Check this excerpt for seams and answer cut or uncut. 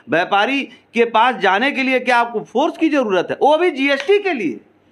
uncut